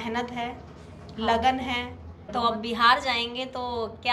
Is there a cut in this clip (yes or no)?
yes